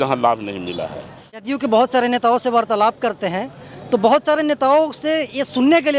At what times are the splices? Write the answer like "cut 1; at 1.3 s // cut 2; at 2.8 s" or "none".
cut 1; at 1.5 s